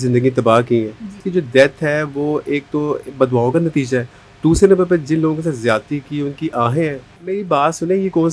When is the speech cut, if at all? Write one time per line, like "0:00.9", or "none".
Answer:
0:01.2
0:07.1